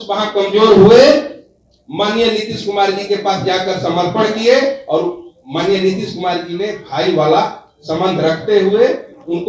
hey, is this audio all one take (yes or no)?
yes